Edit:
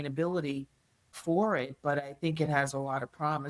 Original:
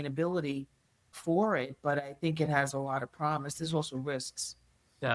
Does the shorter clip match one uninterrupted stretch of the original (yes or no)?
yes